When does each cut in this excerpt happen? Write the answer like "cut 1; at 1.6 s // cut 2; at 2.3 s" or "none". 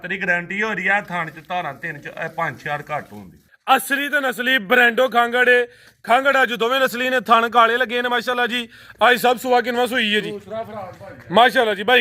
cut 1; at 3.5 s